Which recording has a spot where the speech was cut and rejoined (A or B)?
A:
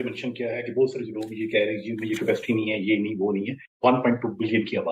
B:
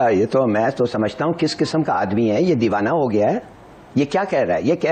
A